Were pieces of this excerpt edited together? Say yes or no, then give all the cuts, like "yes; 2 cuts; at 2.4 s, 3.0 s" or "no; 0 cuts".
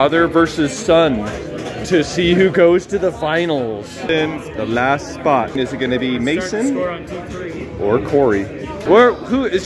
yes; 2 cuts; at 4.1 s, 8.8 s